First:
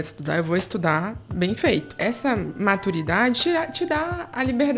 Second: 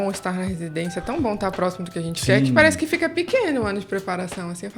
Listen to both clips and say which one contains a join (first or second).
first